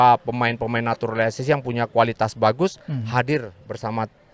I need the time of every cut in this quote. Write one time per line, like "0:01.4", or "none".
none